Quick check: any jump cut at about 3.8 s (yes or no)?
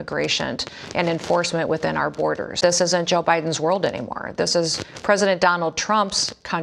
no